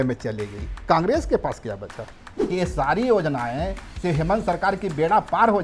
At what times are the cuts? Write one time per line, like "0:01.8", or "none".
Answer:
0:02.3

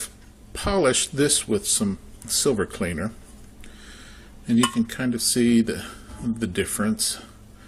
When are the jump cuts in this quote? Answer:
none

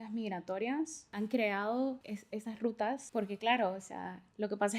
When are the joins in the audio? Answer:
0:01.0
0:02.1
0:03.0

